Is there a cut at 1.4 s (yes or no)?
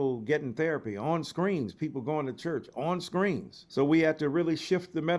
no